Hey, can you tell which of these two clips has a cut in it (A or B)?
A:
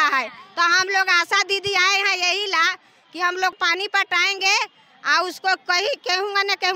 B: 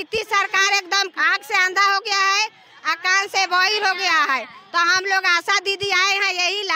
A